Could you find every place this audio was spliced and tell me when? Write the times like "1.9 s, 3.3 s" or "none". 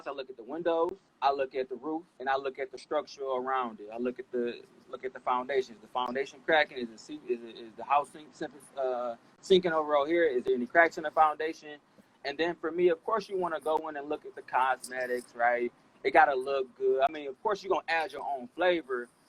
1.0 s, 2.1 s